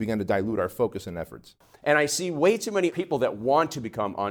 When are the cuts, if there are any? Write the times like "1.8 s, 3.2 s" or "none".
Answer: 1.5 s, 2.9 s